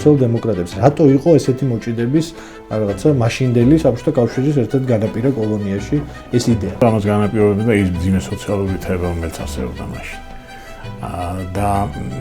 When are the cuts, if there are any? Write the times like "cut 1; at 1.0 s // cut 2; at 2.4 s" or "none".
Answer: cut 1; at 6.8 s